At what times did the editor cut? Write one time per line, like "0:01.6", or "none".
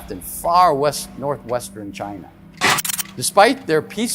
0:02.9